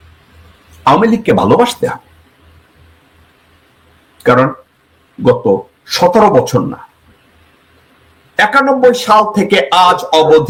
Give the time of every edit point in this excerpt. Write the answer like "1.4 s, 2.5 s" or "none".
none